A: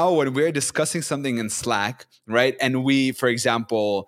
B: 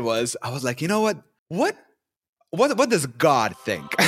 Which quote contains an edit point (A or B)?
B